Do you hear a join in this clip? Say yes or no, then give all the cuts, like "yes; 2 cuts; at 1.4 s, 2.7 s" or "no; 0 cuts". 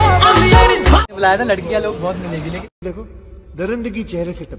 yes; 1 cut; at 1.0 s